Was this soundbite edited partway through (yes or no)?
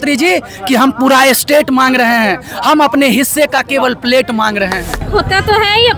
yes